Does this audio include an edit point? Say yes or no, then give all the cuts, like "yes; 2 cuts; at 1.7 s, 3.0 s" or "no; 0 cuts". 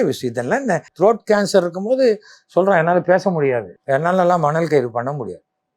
yes; 2 cuts; at 0.9 s, 3.7 s